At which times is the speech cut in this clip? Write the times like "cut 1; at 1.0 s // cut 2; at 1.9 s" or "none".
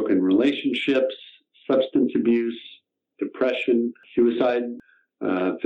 cut 1; at 4.0 s // cut 2; at 4.8 s